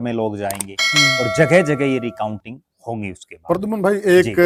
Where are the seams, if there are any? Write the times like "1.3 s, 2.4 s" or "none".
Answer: none